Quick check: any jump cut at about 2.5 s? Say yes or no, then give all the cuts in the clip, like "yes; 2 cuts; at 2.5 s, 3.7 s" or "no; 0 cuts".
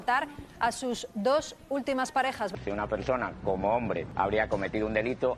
yes; 2 cuts; at 2.5 s, 4.1 s